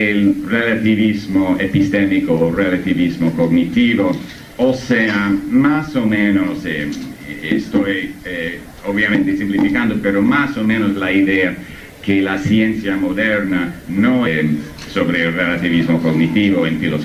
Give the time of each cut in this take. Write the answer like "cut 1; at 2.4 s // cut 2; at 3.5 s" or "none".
none

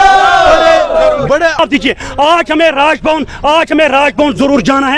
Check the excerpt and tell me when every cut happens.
cut 1; at 1.6 s

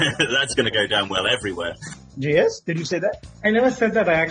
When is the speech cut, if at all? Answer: cut 1; at 1.7 s // cut 2; at 3.3 s

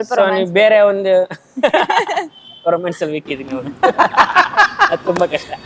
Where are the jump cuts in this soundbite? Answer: none

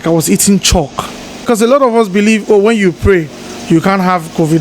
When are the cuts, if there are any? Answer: cut 1; at 1.4 s

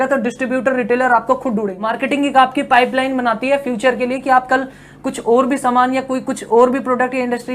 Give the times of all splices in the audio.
cut 1; at 1.8 s

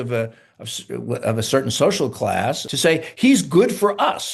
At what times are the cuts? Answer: cut 1; at 2.7 s

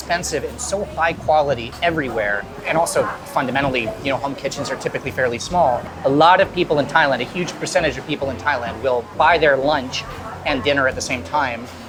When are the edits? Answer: none

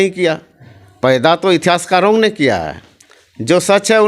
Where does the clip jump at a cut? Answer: none

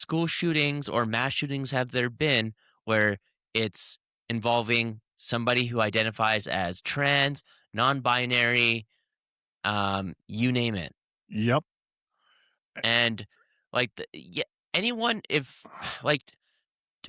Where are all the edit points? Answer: none

